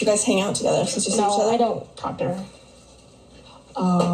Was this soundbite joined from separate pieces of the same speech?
no; 0 cuts

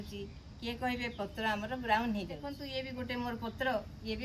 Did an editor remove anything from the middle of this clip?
yes; 1 cut; at 2.6 s

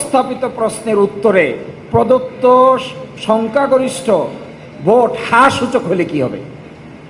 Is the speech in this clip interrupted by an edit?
no; 0 cuts

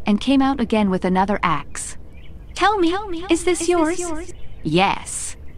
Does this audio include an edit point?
yes; 1 cut; at 4.5 s

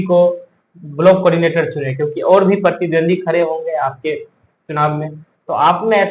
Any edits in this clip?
no; 0 cuts

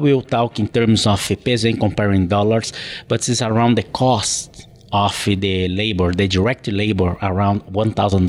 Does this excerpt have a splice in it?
yes; 1 cut; at 1.3 s

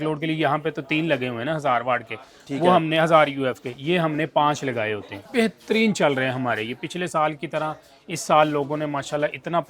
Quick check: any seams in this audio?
yes; 1 cut; at 5.2 s

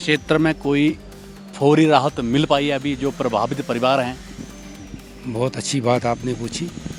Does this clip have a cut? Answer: no; 0 cuts

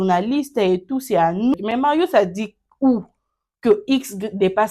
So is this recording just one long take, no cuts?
no; 1 cut; at 1.5 s

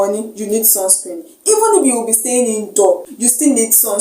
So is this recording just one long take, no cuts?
no; 1 cut; at 3.1 s

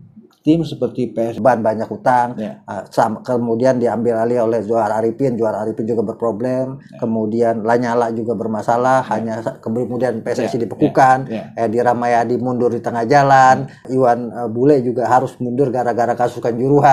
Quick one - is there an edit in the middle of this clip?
yes; 2 cuts; at 1.4 s, 13.8 s

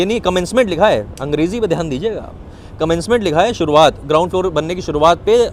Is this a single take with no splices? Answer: yes; 0 cuts

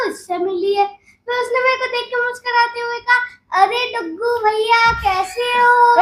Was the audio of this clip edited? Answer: no; 0 cuts

